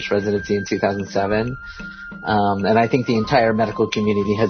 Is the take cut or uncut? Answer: uncut